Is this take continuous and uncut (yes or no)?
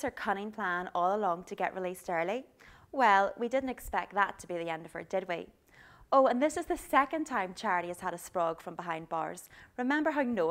no